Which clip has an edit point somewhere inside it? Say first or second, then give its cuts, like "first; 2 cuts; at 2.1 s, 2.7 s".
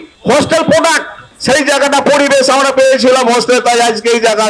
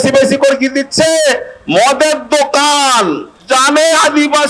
first; 1 cut; at 1.2 s